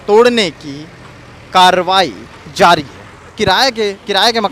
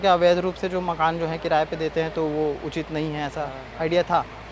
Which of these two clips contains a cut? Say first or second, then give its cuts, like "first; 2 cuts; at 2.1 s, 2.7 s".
first; 1 cut; at 3.3 s